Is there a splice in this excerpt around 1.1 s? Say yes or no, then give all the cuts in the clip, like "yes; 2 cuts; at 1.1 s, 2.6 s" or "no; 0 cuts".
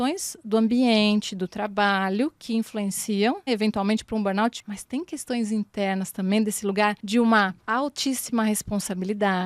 no; 4 cuts; at 3.5 s, 4.6 s, 7.0 s, 7.6 s